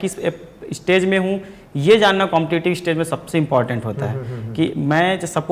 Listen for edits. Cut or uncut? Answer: uncut